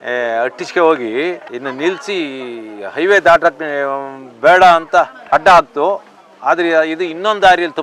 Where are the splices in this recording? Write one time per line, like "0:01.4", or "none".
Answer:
none